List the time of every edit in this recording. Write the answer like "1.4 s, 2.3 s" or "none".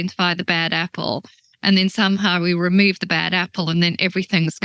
none